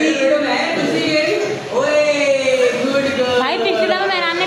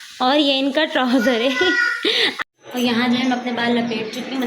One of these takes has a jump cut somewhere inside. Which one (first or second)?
second